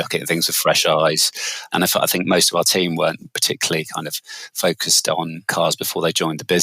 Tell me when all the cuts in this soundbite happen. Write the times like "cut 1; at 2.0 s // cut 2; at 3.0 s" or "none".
cut 1; at 1.6 s // cut 2; at 5.5 s